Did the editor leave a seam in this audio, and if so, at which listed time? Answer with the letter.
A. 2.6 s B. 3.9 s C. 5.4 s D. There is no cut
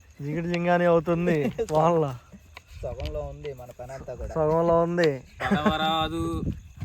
C